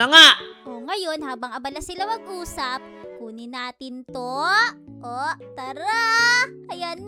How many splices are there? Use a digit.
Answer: 0